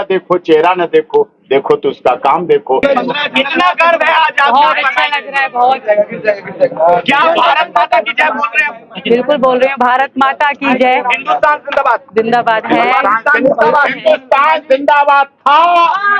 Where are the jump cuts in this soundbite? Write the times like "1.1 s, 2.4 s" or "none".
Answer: 2.8 s